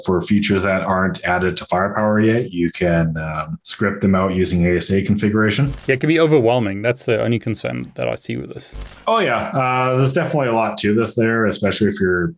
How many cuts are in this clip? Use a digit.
1